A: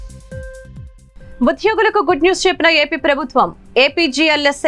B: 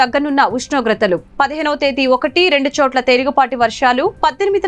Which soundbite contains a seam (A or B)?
A